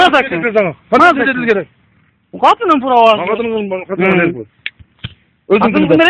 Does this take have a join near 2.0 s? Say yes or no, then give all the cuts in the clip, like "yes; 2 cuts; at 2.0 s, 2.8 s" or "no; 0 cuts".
no; 0 cuts